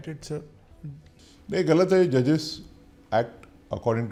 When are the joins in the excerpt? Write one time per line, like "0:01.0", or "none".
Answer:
none

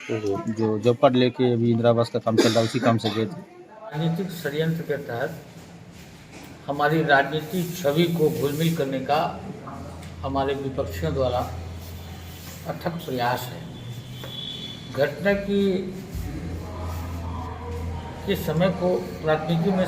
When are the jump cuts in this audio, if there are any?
0:04.0

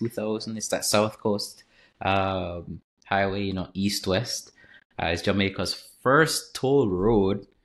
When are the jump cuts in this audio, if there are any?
none

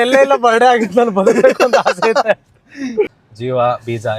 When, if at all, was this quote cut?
0:03.1

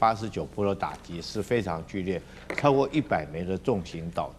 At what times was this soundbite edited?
none

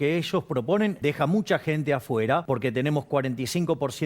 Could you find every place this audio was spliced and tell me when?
0:01.0
0:02.4

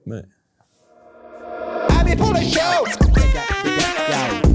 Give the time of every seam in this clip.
0:01.2

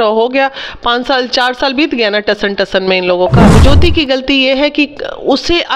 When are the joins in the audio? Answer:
0:03.5

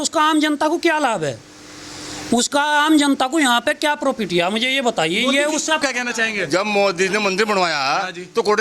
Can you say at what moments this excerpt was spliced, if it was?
0:05.8

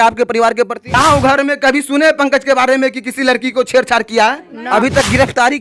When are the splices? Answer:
0:01.0
0:04.5

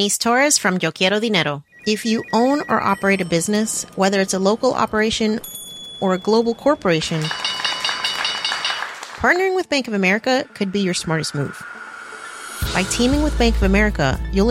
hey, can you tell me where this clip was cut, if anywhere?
0:01.7

